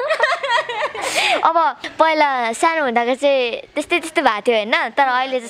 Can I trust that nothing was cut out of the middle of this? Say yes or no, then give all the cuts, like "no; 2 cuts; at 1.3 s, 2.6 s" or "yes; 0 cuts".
yes; 0 cuts